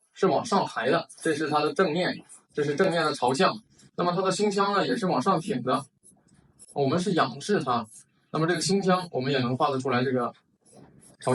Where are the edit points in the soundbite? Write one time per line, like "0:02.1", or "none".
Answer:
0:01.1